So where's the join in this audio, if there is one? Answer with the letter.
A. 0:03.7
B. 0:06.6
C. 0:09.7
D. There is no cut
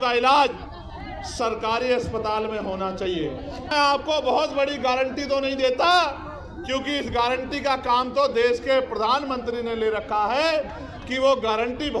A